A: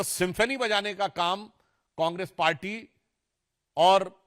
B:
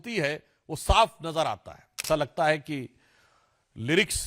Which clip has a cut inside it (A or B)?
B